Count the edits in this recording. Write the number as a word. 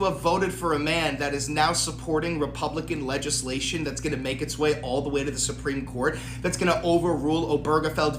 zero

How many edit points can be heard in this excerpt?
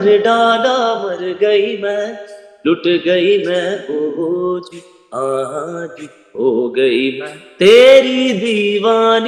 zero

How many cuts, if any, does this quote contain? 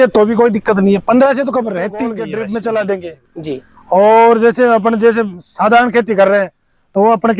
one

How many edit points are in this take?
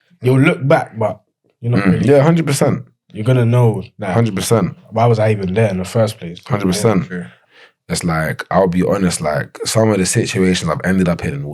one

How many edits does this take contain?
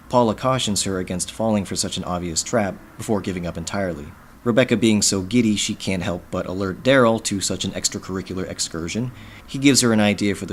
zero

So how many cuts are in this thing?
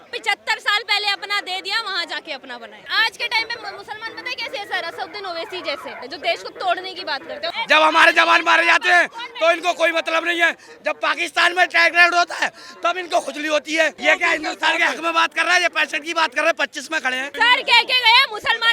five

